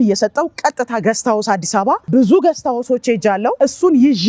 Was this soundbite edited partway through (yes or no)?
yes